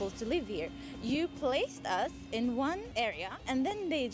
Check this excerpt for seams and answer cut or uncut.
cut